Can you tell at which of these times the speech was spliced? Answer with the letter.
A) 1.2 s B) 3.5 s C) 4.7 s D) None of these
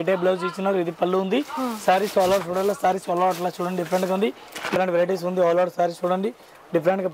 C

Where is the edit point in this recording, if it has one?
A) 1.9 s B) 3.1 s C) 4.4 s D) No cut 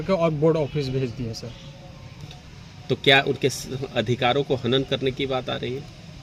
D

